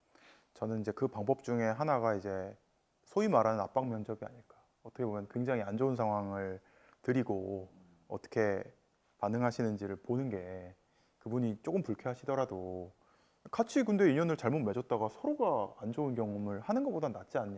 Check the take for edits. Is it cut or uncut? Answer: uncut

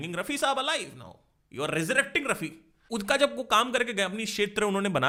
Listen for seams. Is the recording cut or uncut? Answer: uncut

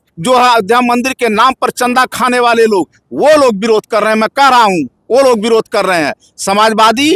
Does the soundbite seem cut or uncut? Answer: uncut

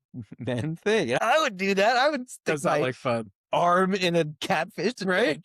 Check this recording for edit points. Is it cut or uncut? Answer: cut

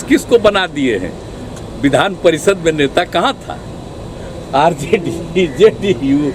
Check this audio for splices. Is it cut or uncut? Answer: uncut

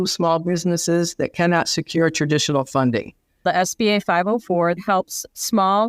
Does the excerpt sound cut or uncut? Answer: cut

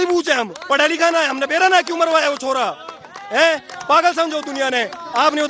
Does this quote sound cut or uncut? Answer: uncut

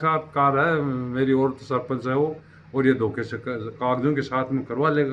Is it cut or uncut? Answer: uncut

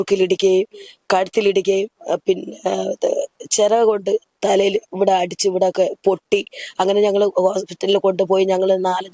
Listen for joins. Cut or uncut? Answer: uncut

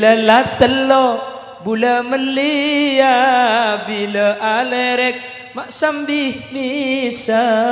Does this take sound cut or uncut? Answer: uncut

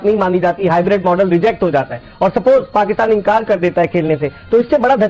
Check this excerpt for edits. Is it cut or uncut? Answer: uncut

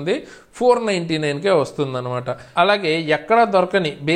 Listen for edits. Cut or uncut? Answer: cut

